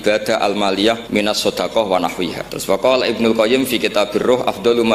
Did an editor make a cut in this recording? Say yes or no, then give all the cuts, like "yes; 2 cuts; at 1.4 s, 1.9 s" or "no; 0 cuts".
yes; 2 cuts; at 1.0 s, 2.5 s